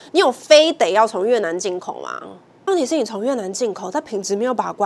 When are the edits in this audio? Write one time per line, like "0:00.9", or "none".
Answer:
0:02.7